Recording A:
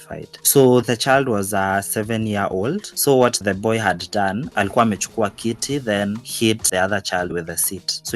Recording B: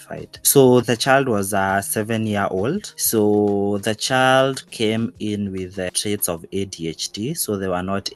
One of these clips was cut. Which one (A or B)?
A